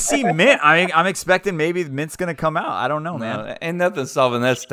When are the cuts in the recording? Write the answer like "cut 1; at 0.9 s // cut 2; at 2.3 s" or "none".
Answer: none